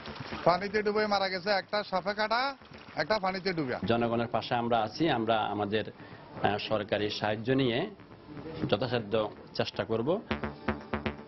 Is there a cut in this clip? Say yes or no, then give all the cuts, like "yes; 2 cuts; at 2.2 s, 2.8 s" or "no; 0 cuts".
yes; 2 cuts; at 3.8 s, 10.4 s